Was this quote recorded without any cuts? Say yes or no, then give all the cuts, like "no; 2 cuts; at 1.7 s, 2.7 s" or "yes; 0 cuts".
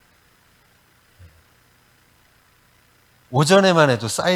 no; 1 cut; at 3.2 s